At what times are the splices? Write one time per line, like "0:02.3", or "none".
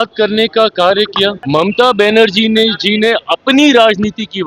0:01.4